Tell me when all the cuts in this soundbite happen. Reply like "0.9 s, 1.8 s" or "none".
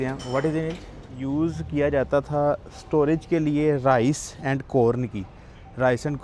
1.1 s